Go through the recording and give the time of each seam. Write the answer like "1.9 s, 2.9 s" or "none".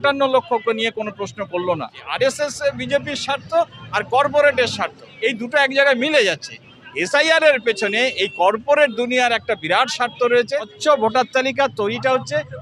2.0 s, 10.7 s